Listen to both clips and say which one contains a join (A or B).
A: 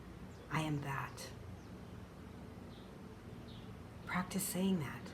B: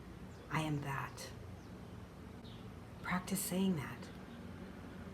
B